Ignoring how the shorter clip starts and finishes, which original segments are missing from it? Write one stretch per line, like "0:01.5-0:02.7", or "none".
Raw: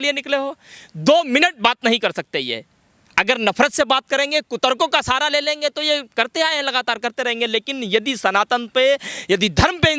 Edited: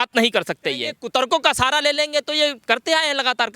0:02.6-0:04.4